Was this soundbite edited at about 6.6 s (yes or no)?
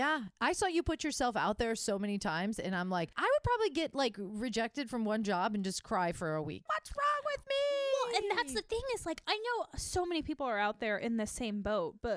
yes